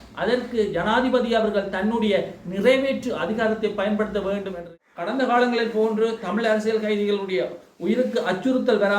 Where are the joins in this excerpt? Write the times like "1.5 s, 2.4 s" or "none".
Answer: 4.7 s